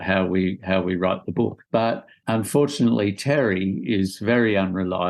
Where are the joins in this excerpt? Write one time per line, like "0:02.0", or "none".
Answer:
0:01.7